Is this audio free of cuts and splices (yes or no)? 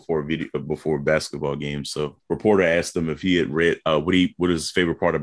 no